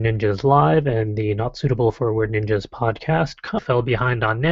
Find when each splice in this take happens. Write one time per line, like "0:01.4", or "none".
none